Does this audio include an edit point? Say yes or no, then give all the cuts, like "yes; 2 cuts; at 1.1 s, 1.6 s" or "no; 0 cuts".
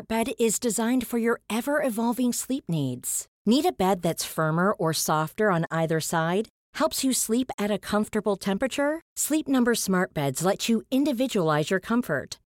no; 0 cuts